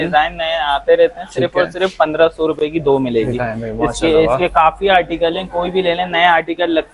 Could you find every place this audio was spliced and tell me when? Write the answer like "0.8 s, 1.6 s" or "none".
none